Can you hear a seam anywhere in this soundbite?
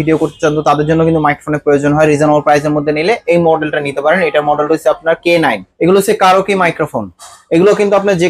yes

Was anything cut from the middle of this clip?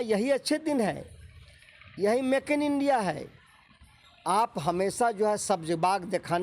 no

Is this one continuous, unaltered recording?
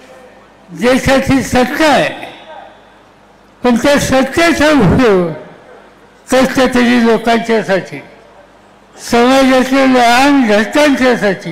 yes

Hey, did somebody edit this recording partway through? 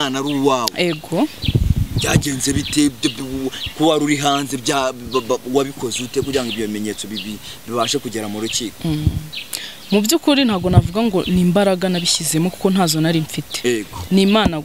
no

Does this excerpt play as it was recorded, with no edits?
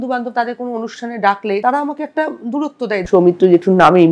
no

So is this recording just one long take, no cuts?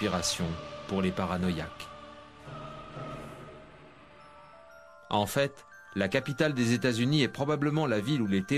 no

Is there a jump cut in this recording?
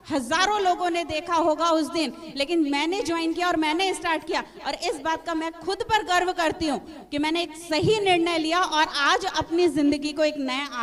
no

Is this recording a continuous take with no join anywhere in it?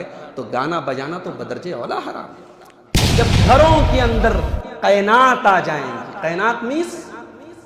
no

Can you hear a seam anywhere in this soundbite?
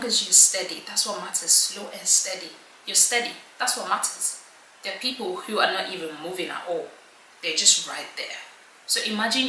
no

